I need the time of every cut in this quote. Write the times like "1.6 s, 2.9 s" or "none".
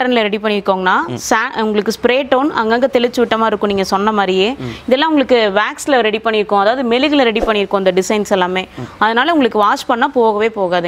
none